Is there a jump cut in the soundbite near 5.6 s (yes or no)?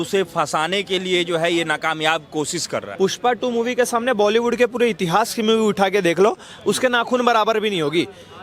no